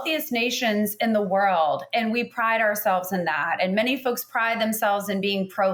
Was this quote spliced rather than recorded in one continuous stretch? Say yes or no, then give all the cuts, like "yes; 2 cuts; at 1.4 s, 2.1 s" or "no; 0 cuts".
no; 0 cuts